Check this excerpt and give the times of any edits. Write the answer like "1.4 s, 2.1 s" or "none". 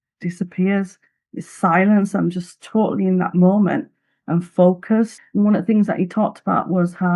5.2 s

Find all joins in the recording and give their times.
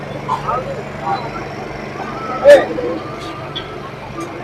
none

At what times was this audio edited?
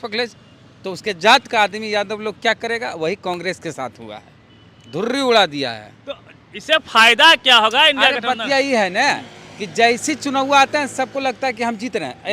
none

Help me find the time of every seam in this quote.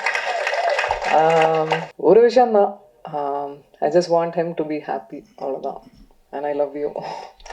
1.9 s

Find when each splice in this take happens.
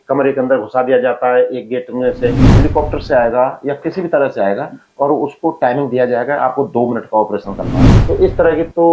2.4 s, 7.9 s

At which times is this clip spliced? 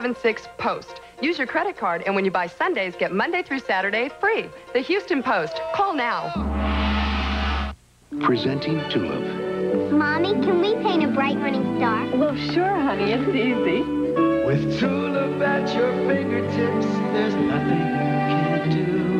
none

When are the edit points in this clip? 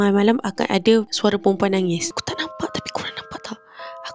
1.1 s, 2.2 s

